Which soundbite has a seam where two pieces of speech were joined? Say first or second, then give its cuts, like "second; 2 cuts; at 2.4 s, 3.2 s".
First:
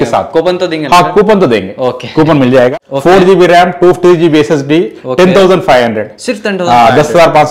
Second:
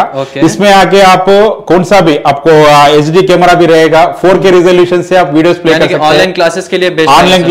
first; 1 cut; at 2.7 s